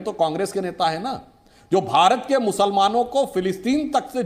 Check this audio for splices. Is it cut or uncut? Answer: uncut